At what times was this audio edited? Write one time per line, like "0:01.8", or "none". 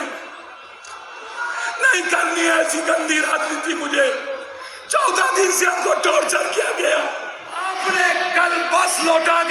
0:07.7